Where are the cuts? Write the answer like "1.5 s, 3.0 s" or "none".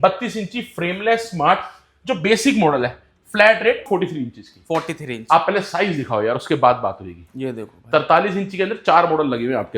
3.9 s